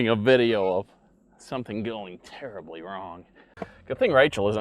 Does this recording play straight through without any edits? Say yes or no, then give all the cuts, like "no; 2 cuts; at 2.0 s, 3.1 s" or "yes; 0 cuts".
no; 1 cut; at 3.5 s